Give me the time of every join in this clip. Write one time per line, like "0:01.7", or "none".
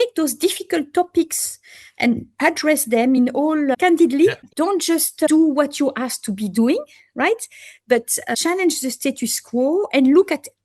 0:03.8
0:04.5